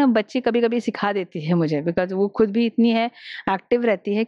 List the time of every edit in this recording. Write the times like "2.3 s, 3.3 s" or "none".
none